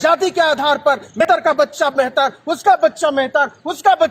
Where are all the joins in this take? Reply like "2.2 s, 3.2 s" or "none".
1.2 s